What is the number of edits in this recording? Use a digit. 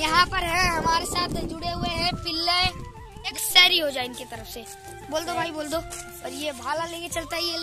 2